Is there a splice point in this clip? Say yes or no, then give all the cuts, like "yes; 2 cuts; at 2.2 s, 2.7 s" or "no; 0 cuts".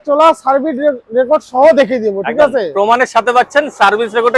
no; 0 cuts